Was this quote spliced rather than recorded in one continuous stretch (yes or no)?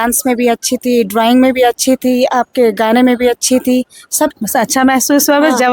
yes